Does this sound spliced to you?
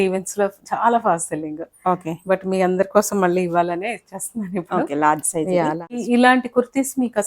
yes; 1 cut; at 6.0 s

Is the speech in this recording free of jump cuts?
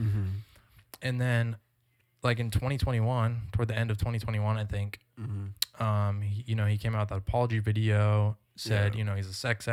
yes; 0 cuts

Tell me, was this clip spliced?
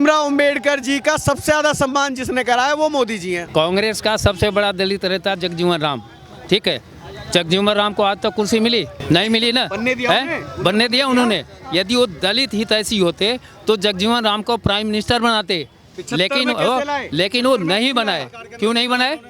yes; 2 cuts; at 3.4 s, 9.0 s

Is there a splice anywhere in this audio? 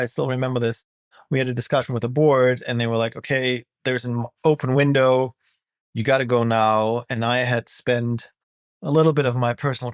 no; 0 cuts

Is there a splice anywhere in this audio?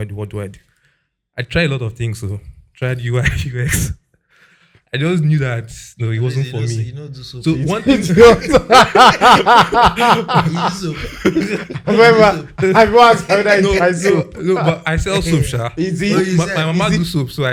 no; 0 cuts

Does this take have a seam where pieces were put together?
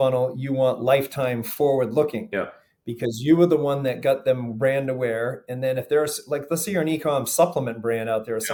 no; 0 cuts

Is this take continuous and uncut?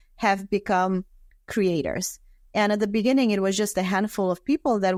yes; 0 cuts

